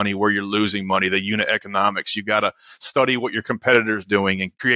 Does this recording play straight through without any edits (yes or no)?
yes